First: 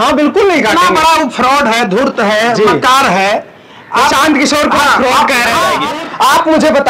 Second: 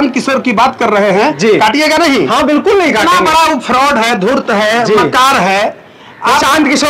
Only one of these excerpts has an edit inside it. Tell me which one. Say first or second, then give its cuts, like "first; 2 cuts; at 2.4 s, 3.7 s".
first; 1 cut; at 5.8 s